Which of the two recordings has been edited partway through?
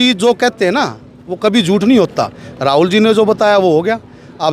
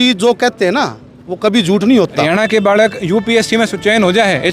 second; 1 cut; at 2.2 s

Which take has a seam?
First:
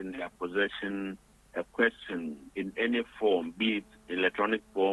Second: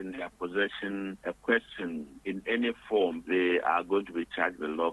second; 2 cuts; at 1.2 s, 3.2 s

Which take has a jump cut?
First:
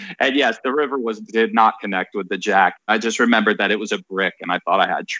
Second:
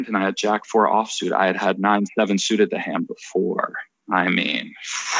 first; 1 cut; at 2.9 s

